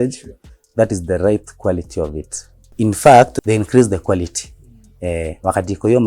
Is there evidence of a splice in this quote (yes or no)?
yes